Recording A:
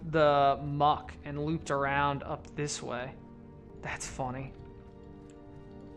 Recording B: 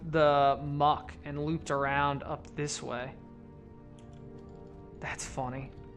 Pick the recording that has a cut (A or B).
A